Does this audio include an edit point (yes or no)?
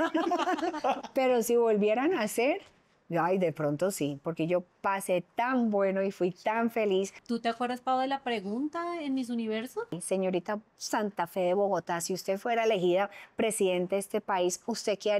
yes